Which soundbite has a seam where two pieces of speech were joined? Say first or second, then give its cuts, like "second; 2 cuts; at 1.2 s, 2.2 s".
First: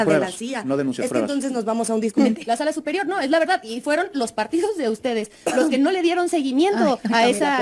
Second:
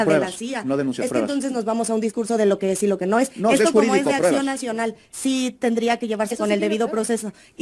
first; 1 cut; at 2.2 s